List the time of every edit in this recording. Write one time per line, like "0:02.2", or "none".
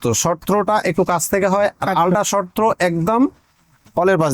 none